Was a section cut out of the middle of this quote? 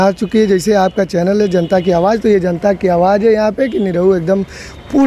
no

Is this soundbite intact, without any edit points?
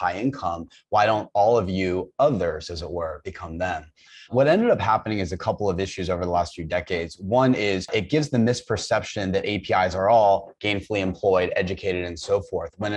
yes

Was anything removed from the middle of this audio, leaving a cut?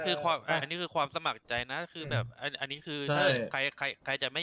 no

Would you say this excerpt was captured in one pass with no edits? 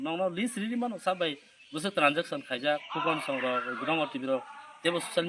no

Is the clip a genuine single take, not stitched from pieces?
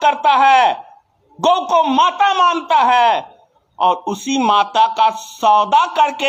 yes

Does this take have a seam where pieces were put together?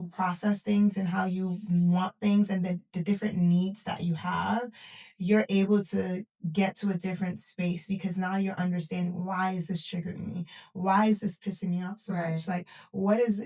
no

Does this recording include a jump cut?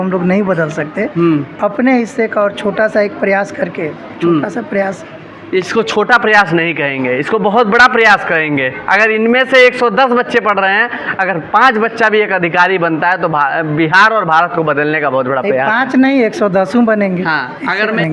no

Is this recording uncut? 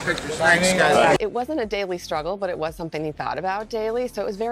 no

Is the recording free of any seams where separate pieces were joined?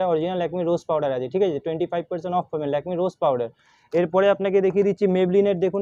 yes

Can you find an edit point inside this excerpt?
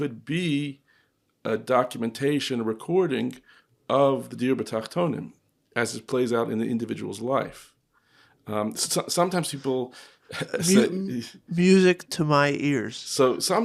no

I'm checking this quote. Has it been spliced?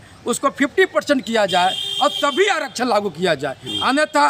no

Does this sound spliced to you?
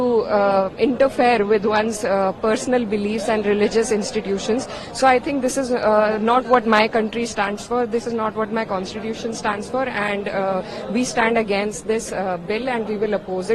no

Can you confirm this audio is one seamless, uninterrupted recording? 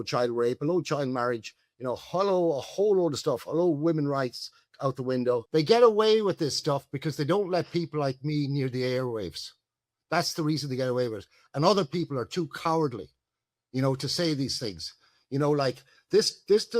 no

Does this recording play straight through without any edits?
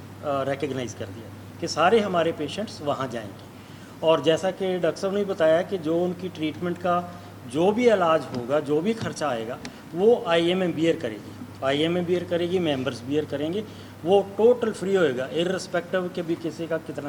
yes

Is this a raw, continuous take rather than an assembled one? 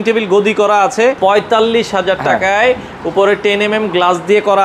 no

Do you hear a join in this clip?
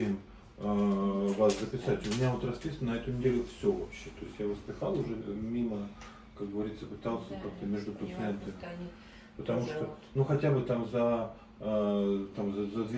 no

